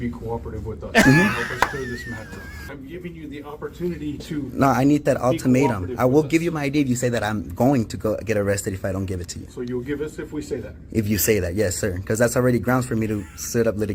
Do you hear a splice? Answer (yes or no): yes